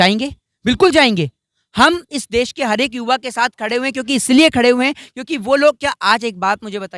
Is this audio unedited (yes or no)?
yes